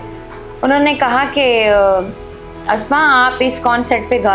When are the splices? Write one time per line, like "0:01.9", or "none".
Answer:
none